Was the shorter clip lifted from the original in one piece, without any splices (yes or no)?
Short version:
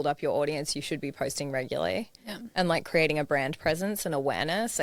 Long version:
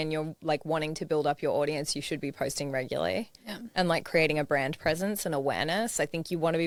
yes